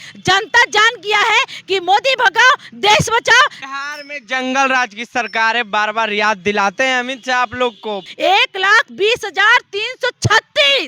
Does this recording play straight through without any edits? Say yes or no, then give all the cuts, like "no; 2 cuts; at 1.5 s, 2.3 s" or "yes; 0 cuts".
no; 2 cuts; at 3.6 s, 8.0 s